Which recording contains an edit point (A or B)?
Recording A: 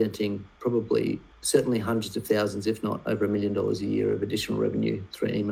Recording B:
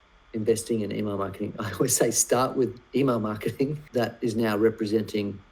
B